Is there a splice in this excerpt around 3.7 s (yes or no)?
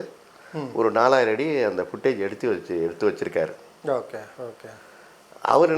no